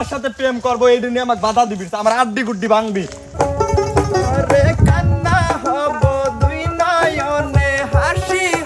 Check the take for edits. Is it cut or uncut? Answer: cut